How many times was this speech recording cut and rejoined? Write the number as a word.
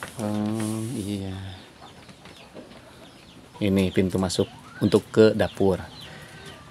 one